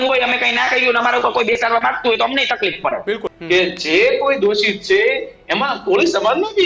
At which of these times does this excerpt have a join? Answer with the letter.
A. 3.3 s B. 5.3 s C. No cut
A